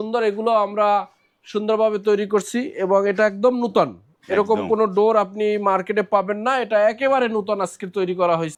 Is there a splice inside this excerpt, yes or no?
no